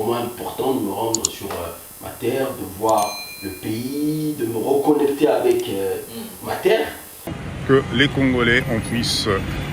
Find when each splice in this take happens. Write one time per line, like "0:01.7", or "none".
0:07.5